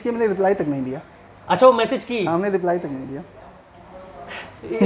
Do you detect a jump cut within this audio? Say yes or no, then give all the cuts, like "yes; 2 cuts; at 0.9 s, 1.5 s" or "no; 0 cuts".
no; 0 cuts